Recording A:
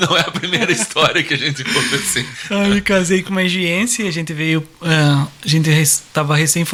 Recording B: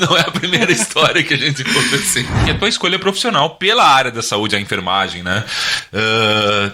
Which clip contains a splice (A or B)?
B